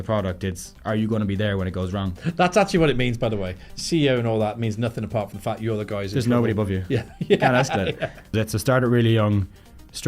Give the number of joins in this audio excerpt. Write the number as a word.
two